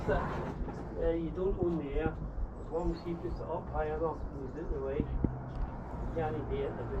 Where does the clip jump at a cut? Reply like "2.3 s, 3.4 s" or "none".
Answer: none